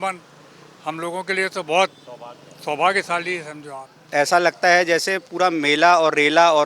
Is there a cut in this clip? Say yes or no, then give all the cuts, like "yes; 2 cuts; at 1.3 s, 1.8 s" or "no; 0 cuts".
yes; 1 cut; at 4.0 s